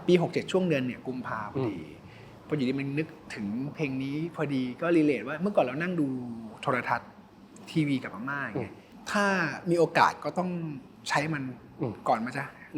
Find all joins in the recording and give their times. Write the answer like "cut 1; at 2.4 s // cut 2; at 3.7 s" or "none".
cut 1; at 8.8 s // cut 2; at 10.9 s